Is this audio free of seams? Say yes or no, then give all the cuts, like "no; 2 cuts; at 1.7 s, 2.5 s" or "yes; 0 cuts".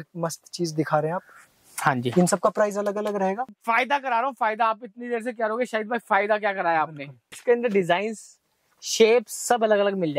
no; 2 cuts; at 3.5 s, 7.4 s